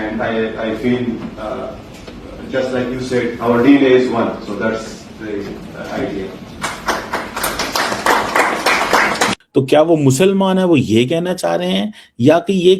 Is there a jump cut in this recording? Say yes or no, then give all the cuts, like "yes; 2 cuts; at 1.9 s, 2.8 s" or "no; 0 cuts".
yes; 1 cut; at 9.4 s